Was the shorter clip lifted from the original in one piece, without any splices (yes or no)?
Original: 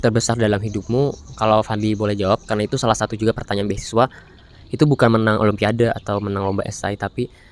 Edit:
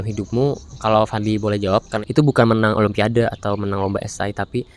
no